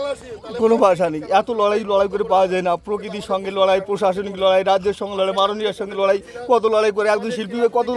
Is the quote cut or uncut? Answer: uncut